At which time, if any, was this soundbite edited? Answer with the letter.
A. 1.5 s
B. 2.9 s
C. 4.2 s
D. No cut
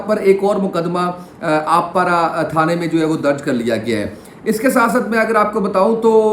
D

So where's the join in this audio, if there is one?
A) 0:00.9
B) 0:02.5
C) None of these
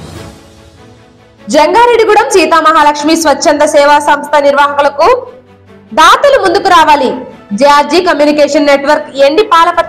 A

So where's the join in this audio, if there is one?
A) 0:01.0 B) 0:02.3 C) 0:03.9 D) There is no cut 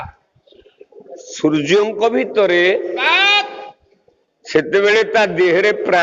B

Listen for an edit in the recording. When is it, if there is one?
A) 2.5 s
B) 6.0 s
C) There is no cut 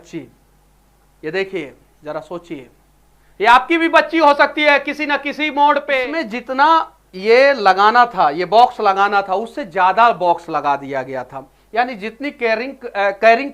B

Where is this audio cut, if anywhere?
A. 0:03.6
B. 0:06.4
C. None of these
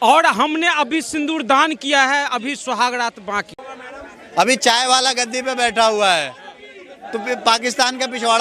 A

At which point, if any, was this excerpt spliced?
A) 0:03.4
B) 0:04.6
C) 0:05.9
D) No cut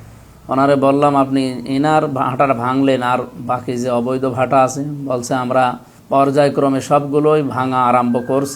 C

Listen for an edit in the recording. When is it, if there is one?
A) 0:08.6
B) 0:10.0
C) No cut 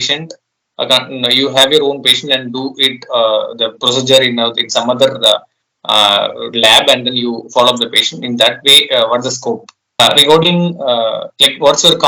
B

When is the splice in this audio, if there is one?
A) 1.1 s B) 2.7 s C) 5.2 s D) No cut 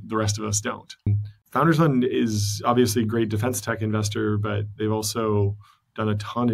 A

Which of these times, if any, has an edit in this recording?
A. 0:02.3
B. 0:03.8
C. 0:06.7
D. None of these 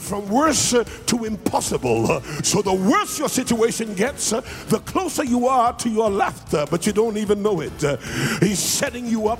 A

